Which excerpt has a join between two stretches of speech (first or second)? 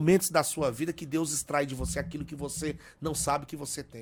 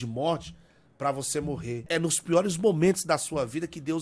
second